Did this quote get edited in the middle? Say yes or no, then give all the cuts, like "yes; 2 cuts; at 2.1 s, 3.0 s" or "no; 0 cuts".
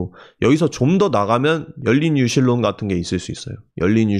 no; 0 cuts